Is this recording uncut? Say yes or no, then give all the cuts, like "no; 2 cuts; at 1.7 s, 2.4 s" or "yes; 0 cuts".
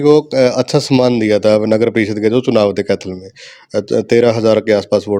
yes; 0 cuts